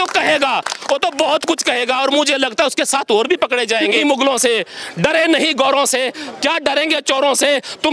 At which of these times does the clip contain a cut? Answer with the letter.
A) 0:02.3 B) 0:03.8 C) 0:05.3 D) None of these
B